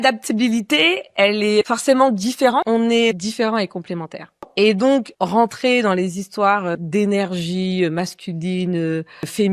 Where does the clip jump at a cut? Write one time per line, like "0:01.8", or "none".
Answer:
0:02.6